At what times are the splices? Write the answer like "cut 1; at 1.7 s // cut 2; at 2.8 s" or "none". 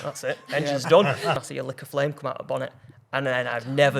cut 1; at 1.4 s